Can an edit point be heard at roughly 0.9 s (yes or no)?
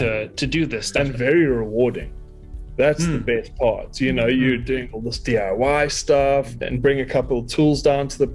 yes